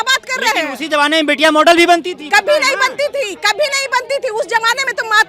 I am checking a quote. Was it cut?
no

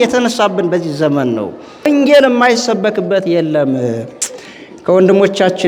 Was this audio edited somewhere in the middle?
yes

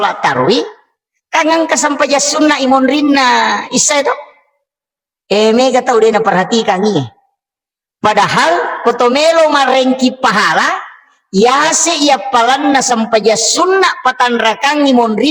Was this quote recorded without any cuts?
yes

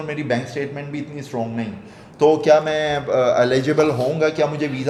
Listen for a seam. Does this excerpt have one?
no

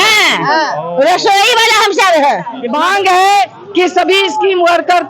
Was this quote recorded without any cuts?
no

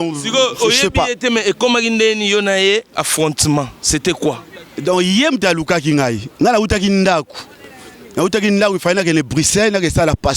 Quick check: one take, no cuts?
yes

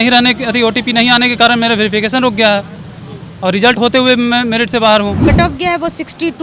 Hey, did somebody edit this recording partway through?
yes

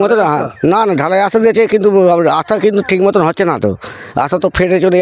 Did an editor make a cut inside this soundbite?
no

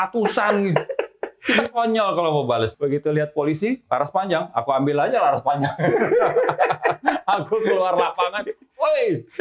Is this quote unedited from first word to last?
no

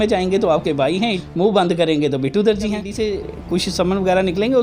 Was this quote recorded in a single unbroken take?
no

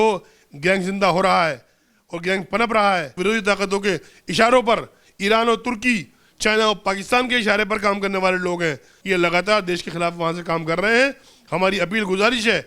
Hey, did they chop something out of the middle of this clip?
yes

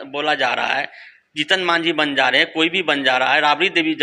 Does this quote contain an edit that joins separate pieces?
no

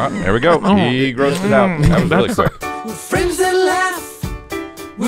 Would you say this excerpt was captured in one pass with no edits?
no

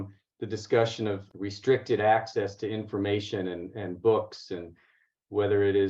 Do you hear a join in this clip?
yes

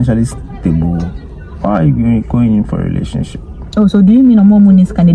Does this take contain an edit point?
no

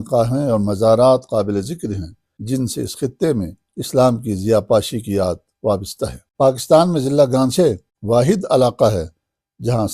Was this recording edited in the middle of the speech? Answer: yes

